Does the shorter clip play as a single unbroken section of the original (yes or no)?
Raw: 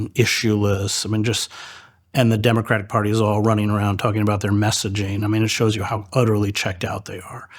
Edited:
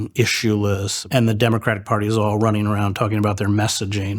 no